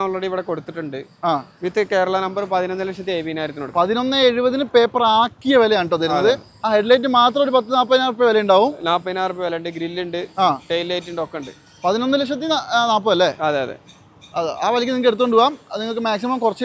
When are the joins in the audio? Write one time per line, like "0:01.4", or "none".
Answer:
none